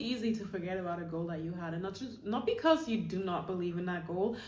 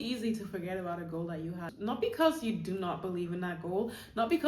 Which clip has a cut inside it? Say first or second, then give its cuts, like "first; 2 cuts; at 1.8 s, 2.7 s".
second; 1 cut; at 1.7 s